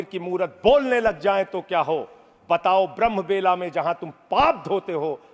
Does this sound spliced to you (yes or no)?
no